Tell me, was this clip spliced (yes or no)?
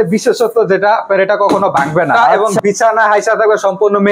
yes